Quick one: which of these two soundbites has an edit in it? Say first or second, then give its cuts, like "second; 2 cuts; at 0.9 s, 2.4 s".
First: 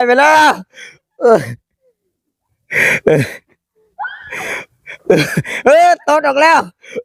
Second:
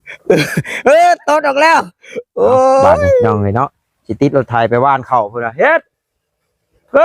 second; 1 cut; at 3.3 s